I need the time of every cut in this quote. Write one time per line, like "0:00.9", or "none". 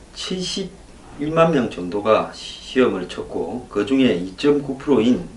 0:02.5